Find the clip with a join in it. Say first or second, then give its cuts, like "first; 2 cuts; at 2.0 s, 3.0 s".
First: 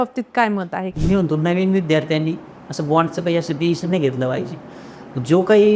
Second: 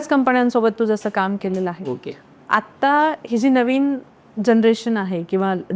first; 1 cut; at 0.9 s